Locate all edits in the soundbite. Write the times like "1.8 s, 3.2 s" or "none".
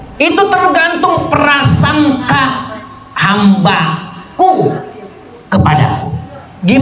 none